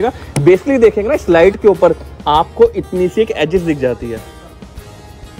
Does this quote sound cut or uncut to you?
uncut